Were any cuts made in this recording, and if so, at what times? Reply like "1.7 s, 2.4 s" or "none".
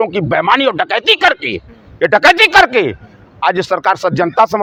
none

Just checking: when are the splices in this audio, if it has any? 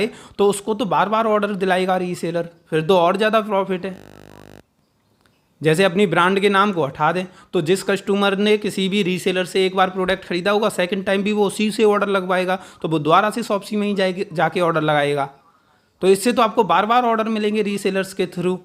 none

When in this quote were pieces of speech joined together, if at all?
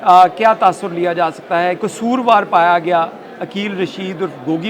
1.9 s

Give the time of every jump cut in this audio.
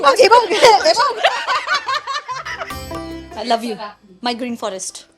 2.8 s

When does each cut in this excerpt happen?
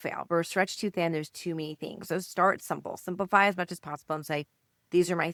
none

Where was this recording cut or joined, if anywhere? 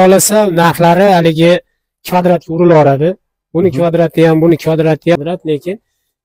5.2 s

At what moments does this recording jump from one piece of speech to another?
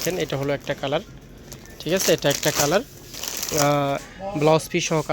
4.0 s

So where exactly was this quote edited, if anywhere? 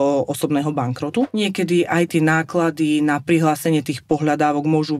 1.3 s

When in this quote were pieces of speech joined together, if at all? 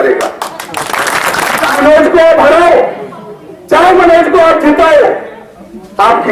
1.8 s

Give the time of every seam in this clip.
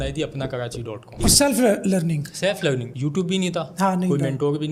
1.2 s

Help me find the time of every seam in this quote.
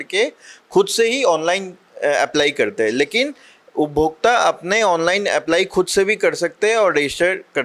none

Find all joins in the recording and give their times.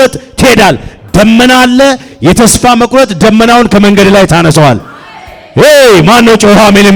none

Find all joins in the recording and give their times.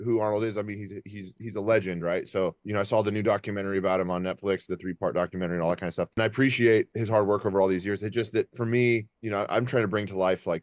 6.1 s, 7.0 s

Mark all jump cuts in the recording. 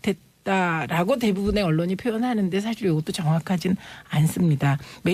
1.1 s

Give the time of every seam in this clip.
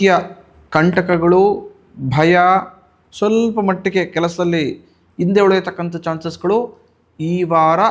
none

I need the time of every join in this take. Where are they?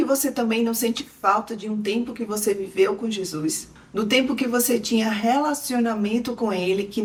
none

